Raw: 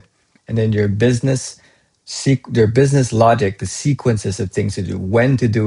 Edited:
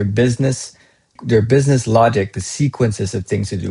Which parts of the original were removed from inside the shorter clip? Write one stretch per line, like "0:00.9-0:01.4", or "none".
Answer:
0:02.0-0:02.5